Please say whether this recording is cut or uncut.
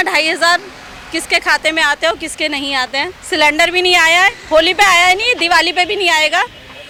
uncut